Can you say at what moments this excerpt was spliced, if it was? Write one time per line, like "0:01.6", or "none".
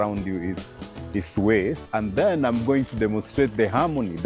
0:01.9